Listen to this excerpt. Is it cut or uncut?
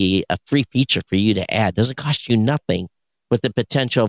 uncut